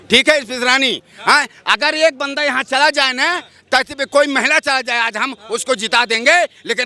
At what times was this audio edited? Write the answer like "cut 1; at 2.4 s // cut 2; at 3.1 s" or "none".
none